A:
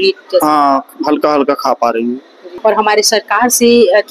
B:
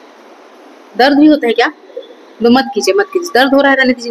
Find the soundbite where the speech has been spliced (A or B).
A